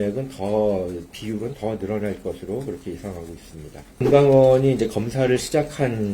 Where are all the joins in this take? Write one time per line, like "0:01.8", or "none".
0:01.1
0:04.0